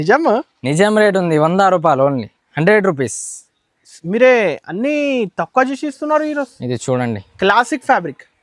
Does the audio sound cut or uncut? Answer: uncut